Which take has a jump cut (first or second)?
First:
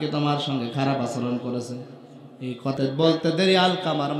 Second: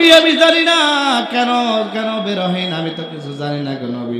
first